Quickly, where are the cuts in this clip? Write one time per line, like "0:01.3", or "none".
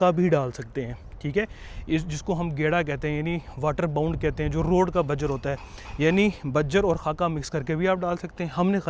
none